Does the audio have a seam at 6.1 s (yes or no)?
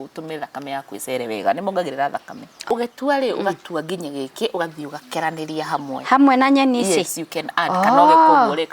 no